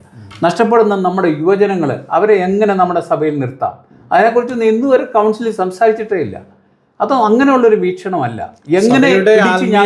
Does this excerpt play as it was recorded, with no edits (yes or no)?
yes